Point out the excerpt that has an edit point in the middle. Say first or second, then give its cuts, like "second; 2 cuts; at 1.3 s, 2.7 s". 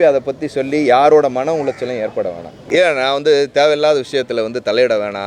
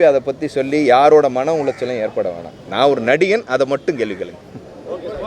first; 1 cut; at 2.5 s